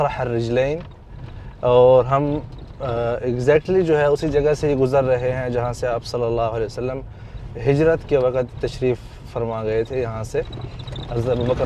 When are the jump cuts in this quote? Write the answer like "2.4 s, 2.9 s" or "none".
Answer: none